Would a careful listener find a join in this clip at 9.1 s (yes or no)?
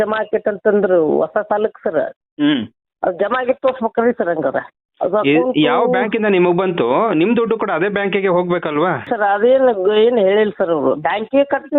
yes